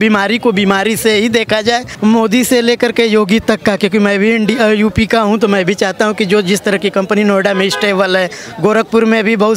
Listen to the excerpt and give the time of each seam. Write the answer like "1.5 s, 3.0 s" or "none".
1.9 s